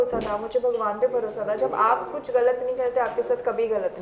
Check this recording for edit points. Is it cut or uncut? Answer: uncut